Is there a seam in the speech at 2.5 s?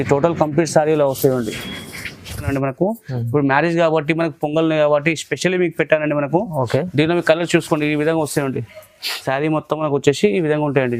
yes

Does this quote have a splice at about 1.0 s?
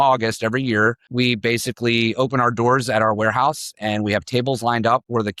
yes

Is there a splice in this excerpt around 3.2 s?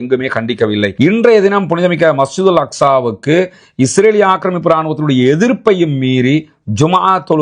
no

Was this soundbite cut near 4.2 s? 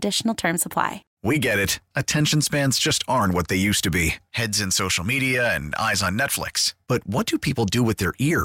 no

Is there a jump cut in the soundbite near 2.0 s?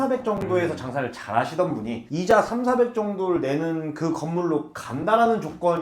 yes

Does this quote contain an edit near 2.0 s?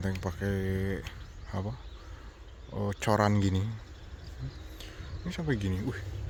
no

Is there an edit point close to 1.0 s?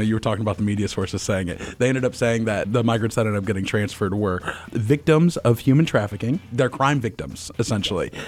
no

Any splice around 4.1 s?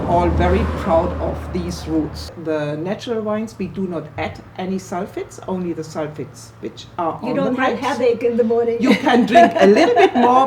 no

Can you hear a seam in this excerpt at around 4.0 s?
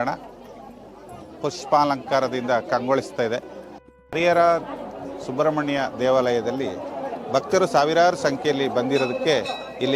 yes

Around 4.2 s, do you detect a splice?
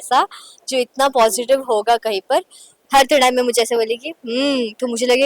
no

